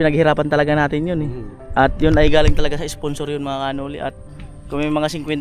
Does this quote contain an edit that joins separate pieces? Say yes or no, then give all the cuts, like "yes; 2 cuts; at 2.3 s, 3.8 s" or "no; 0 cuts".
no; 0 cuts